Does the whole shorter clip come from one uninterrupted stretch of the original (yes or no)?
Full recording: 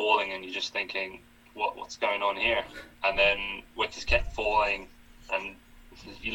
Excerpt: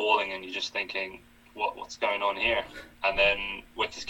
yes